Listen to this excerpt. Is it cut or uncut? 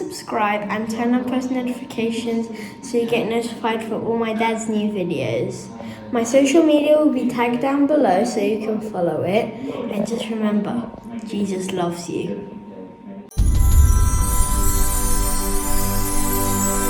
cut